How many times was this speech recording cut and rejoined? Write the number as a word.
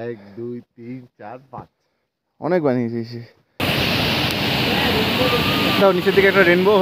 one